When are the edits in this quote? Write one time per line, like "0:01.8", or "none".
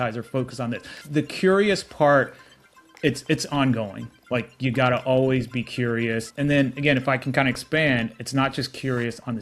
0:01.0
0:06.3